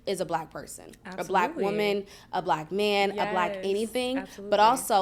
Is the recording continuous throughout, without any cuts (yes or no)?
yes